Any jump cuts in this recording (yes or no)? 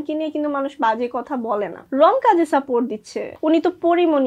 yes